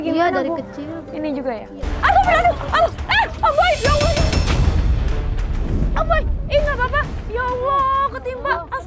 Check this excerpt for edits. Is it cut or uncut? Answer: uncut